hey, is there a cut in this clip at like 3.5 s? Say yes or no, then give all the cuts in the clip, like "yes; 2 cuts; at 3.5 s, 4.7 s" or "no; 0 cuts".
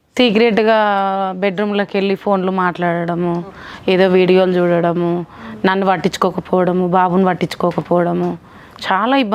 no; 0 cuts